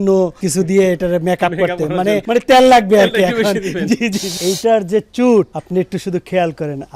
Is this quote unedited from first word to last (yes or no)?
no